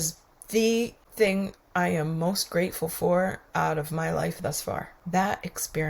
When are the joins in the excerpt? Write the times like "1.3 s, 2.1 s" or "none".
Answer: 1.0 s, 4.9 s